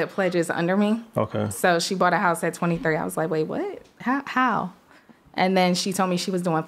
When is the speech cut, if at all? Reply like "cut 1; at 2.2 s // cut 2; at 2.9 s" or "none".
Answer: none